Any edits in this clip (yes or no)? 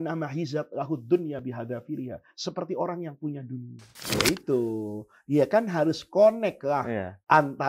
yes